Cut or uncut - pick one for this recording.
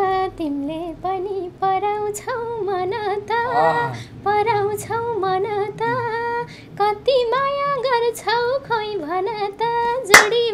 uncut